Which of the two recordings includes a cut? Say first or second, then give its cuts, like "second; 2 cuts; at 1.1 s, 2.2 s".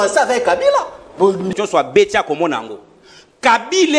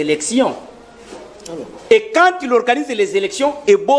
first; 1 cut; at 1.5 s